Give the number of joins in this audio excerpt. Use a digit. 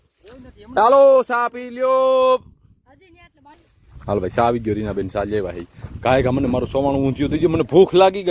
1